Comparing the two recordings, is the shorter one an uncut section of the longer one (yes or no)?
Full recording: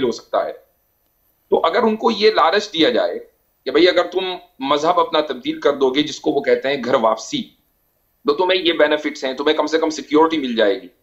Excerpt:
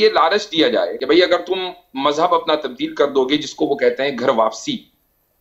no